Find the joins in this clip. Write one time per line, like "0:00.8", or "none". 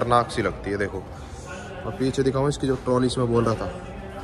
none